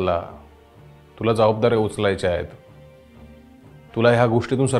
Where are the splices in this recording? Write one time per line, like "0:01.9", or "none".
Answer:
none